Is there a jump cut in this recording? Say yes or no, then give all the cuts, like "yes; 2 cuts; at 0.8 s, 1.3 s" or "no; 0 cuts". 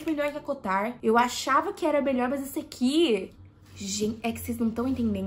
no; 0 cuts